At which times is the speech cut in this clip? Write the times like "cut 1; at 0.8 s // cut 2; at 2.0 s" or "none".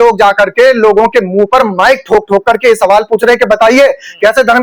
none